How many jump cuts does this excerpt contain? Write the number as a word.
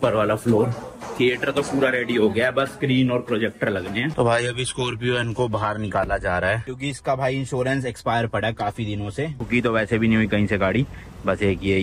two